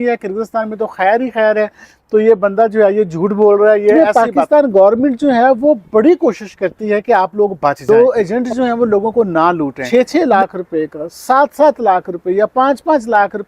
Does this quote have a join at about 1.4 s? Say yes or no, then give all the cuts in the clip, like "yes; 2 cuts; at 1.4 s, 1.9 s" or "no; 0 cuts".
no; 3 cuts; at 3.9 s, 7.8 s, 9.8 s